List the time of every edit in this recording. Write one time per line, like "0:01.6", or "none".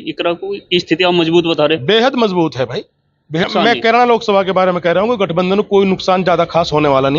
0:03.5